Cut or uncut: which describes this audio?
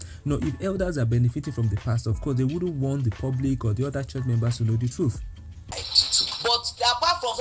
cut